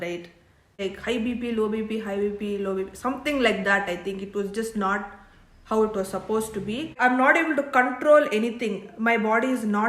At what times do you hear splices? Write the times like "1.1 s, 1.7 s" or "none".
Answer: 0.8 s, 6.9 s